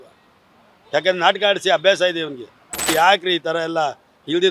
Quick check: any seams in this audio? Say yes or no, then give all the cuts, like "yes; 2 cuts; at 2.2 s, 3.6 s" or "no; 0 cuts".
yes; 1 cut; at 2.9 s